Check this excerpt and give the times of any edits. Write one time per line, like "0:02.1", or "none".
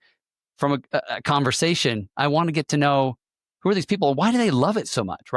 none